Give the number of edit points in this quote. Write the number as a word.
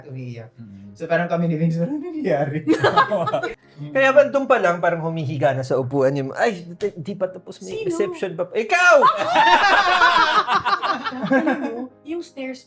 two